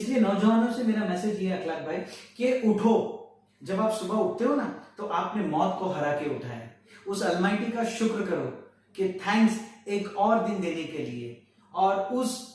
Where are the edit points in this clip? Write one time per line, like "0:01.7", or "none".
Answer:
none